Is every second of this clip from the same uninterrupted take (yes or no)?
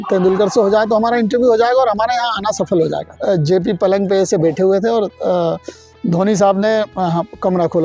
no